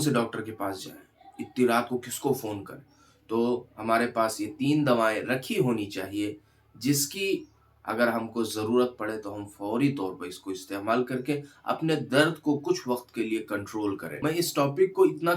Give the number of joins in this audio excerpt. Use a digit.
1